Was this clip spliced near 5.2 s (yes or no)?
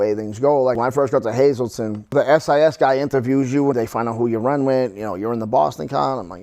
no